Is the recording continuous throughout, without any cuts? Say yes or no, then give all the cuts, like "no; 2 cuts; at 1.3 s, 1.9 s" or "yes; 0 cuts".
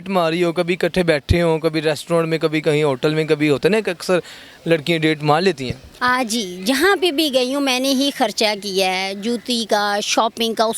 yes; 0 cuts